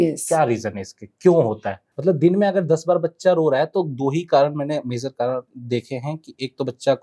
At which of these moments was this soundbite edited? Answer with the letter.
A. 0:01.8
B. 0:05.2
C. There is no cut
A